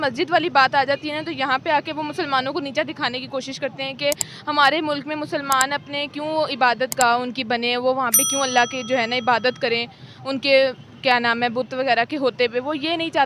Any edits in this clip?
yes; 1 cut; at 4.7 s

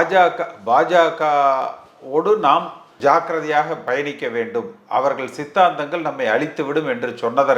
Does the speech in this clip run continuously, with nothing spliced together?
no; 1 cut; at 2.8 s

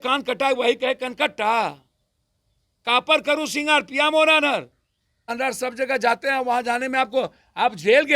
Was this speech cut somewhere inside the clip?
yes; 1 cut; at 5.3 s

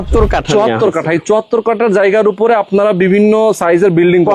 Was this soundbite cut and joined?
no; 0 cuts

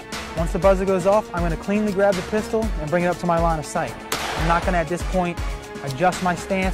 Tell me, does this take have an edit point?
no; 0 cuts

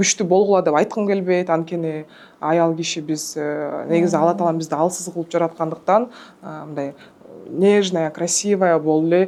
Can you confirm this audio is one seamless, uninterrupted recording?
yes; 0 cuts

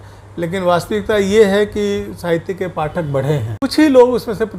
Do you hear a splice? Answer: yes; 1 cut; at 3.5 s

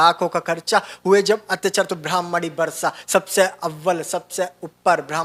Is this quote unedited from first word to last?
yes; 0 cuts

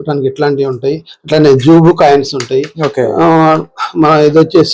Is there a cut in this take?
no; 0 cuts

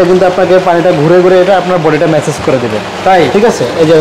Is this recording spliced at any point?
no; 0 cuts

